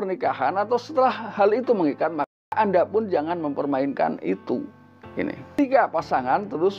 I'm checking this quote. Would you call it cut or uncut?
cut